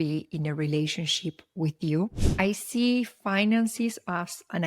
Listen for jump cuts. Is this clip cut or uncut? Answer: cut